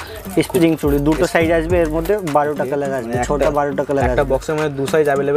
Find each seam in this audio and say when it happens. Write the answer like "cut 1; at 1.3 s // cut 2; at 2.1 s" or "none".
none